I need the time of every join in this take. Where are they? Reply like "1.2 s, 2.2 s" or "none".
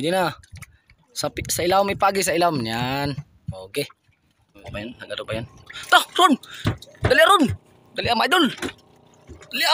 4.7 s

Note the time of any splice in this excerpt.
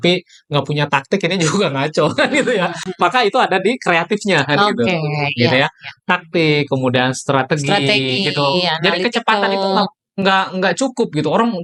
none

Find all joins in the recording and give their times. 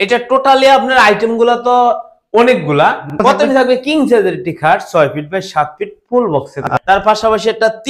3.2 s, 6.7 s

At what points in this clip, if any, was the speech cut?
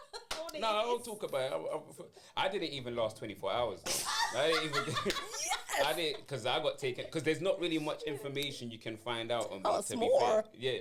none

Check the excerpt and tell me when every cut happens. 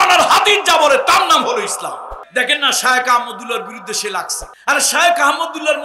2.1 s, 4.4 s

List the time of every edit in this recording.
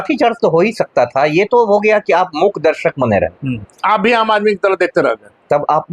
none

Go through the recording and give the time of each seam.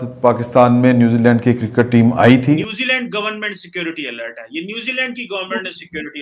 2.6 s

